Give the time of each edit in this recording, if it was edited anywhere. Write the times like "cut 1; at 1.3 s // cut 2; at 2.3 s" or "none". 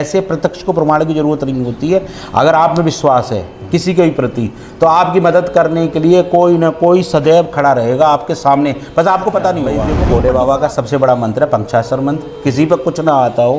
cut 1; at 10.0 s